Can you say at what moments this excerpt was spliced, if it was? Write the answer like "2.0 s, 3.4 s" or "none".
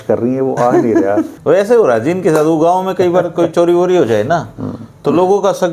1.3 s